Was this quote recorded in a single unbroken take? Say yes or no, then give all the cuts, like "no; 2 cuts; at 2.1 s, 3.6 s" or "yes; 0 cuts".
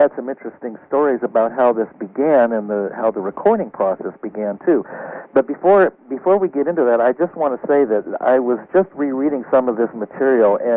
no; 1 cut; at 1.3 s